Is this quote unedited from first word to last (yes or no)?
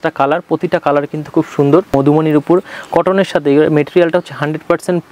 no